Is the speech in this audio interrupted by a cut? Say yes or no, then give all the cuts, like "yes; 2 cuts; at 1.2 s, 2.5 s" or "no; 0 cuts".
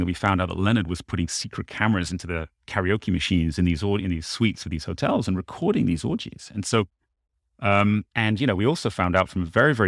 no; 0 cuts